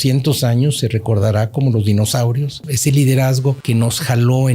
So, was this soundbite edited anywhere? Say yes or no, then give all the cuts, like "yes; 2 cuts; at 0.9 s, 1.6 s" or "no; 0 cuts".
yes; 2 cuts; at 2.6 s, 3.6 s